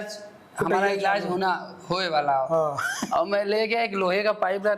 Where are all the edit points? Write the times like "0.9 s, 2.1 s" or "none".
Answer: none